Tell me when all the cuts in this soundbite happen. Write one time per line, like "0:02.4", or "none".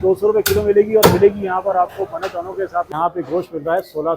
0:02.9